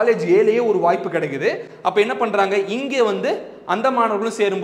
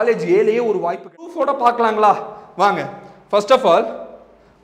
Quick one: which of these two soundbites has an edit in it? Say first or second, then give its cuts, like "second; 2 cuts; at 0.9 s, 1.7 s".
second; 1 cut; at 1.3 s